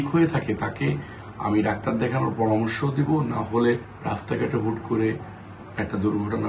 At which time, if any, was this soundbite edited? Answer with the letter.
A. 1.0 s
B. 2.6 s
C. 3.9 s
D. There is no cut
C